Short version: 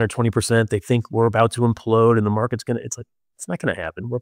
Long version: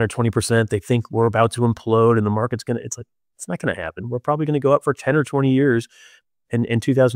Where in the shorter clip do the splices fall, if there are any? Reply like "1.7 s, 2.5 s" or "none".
none